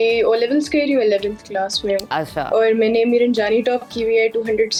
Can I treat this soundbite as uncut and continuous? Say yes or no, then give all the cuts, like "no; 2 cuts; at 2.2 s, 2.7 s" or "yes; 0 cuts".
yes; 0 cuts